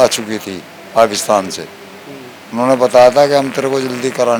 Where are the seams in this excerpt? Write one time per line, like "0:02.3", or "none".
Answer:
none